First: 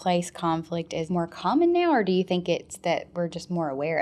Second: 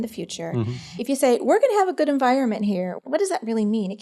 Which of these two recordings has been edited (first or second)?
second